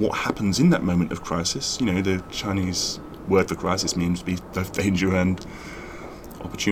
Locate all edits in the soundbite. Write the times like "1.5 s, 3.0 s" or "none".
none